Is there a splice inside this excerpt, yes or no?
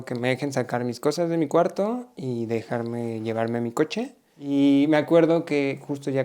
yes